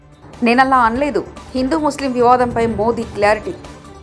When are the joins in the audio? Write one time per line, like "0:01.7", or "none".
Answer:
none